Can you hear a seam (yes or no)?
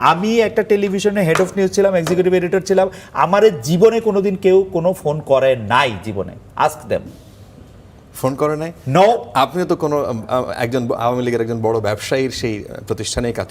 no